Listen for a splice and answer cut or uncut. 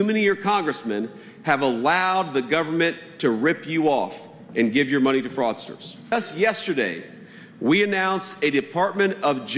cut